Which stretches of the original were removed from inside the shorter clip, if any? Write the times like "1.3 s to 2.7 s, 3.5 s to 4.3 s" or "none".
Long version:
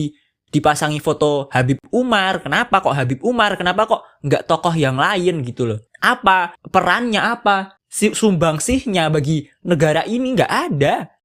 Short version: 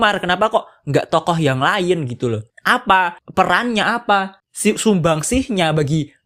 none